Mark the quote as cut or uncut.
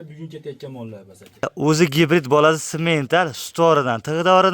cut